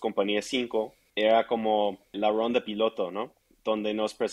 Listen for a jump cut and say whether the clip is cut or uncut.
cut